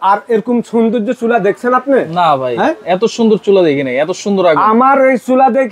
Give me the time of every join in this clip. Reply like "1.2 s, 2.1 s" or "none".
none